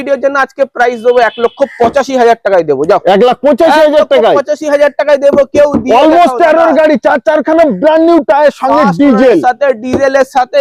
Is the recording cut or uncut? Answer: uncut